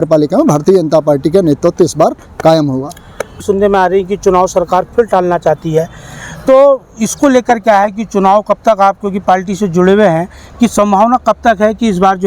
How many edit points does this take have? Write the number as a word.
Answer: zero